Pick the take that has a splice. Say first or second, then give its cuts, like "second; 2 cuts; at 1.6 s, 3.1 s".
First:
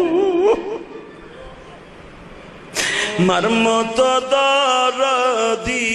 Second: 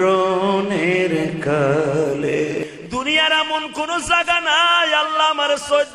second; 1 cut; at 2.6 s